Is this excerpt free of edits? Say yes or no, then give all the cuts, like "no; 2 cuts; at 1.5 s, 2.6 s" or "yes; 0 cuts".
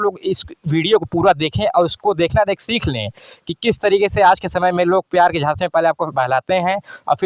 yes; 0 cuts